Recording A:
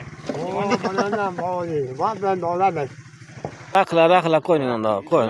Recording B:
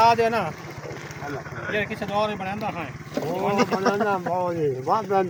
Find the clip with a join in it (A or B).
A